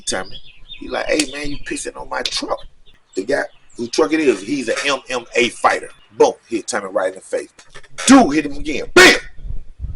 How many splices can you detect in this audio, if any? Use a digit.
3